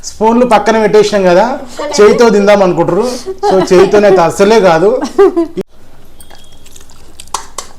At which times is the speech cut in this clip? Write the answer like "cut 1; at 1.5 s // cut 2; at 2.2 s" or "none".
cut 1; at 5.7 s